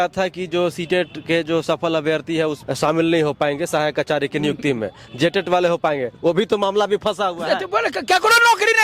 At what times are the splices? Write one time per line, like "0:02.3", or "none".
0:02.6

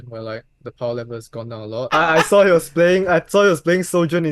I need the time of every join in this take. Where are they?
0:01.9

